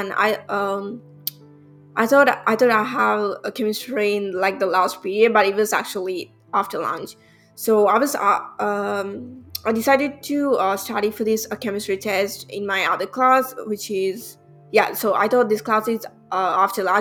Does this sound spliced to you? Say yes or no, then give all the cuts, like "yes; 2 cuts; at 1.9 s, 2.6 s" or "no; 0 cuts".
no; 0 cuts